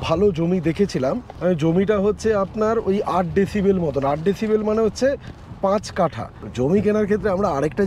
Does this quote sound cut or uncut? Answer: cut